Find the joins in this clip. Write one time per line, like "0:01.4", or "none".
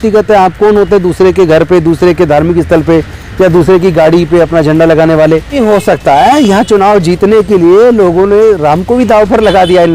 0:05.6